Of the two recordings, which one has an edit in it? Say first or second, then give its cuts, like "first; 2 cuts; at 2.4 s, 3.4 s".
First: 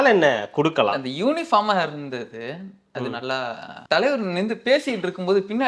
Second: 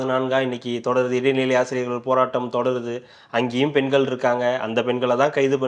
first; 1 cut; at 3.7 s